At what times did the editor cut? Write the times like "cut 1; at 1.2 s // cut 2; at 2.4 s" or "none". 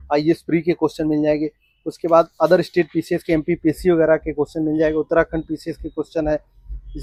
none